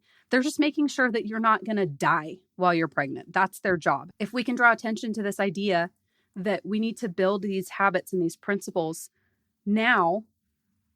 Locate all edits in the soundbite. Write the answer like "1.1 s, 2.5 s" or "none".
4.0 s